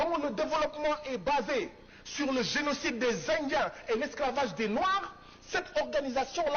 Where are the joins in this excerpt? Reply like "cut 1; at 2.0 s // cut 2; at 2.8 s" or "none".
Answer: none